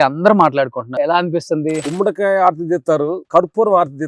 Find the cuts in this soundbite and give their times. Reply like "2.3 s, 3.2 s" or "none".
0.9 s, 1.9 s, 3.2 s

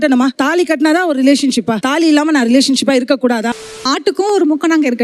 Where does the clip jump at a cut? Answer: 3.7 s

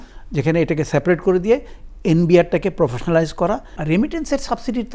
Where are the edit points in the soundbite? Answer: 3.7 s

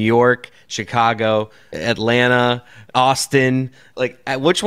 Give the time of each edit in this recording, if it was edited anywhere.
1.6 s, 2.8 s, 3.8 s

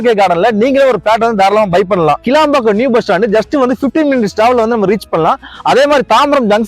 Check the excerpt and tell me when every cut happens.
2.2 s

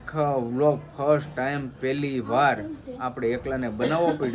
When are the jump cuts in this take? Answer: none

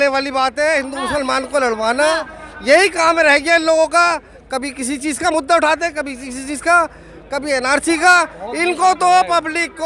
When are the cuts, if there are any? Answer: none

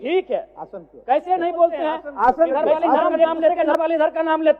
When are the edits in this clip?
3.3 s

